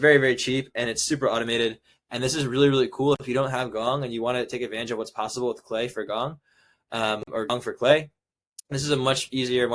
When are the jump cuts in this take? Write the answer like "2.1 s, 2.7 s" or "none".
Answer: none